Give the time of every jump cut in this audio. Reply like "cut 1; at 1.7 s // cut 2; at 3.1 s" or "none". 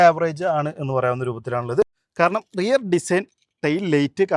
cut 1; at 2.1 s